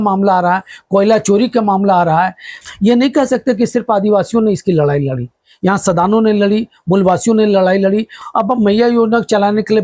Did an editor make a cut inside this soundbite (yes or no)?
yes